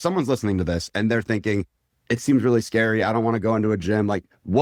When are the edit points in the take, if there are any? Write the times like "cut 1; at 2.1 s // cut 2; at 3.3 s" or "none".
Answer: none